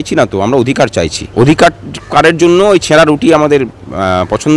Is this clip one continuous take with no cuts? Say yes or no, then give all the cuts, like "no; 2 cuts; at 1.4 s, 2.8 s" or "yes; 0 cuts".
no; 1 cut; at 1.2 s